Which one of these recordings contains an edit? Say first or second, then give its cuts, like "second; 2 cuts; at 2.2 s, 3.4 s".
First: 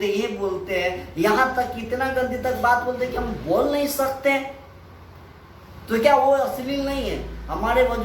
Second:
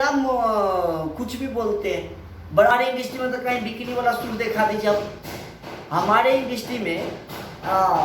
second; 1 cut; at 2.7 s